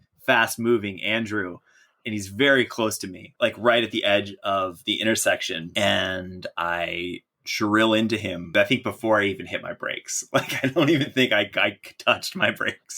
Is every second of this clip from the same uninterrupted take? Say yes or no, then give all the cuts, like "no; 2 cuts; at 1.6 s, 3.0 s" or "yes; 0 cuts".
no; 3 cuts; at 3.3 s, 5.7 s, 8.5 s